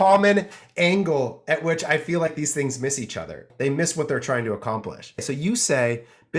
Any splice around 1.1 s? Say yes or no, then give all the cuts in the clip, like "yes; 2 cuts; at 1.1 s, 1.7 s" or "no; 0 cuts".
no; 2 cuts; at 3.4 s, 5.2 s